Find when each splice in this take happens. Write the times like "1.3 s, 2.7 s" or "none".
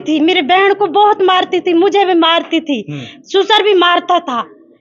none